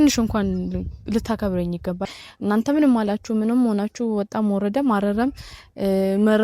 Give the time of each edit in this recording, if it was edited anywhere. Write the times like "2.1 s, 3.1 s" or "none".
2.0 s

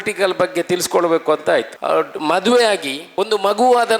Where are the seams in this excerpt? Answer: 1.7 s, 3.0 s

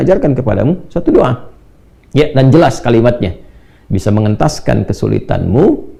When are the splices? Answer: none

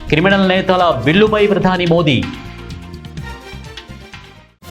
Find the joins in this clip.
2.4 s

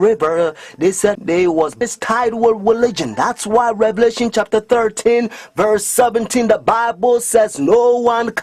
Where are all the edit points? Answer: none

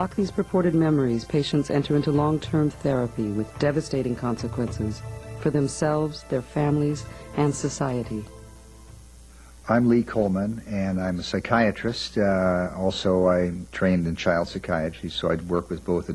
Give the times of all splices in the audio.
none

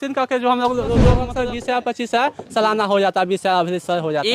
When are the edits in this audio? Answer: 1.3 s

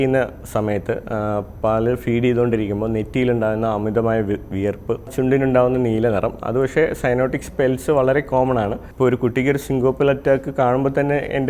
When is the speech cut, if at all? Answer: 5.1 s, 8.8 s

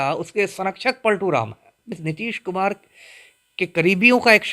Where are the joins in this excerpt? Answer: 1.9 s

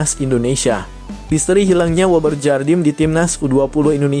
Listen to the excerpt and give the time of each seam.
1.1 s

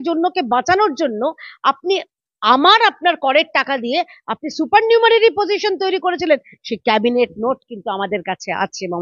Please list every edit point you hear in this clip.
none

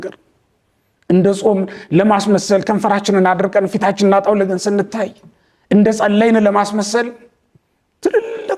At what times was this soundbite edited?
none

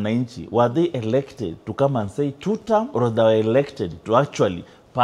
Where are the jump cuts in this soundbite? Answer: 2.9 s

